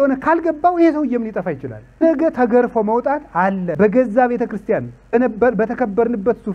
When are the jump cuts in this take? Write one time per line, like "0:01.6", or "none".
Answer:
0:02.0
0:03.7
0:05.1